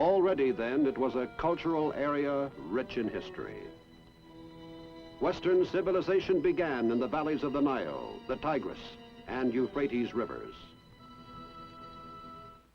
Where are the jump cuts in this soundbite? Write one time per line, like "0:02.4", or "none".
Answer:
0:10.3